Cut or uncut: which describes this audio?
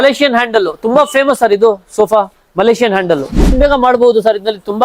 cut